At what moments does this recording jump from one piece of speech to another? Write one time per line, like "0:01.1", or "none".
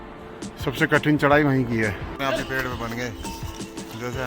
0:02.1

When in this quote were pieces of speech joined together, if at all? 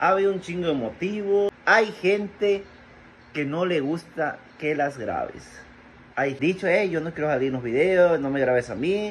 0:01.5
0:06.4

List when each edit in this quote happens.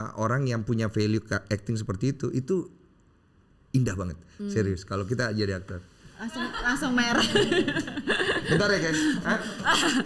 none

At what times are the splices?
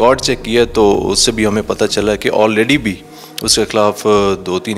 none

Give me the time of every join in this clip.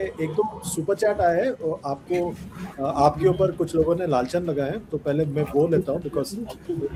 none

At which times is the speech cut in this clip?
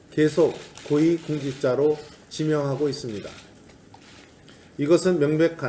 0:00.9

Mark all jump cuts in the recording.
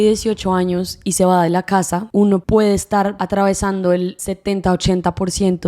0:02.1
0:03.2

